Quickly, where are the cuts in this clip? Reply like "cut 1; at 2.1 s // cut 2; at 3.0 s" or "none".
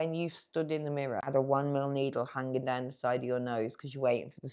cut 1; at 1.2 s